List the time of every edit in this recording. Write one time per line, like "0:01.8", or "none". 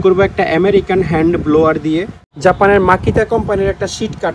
0:02.2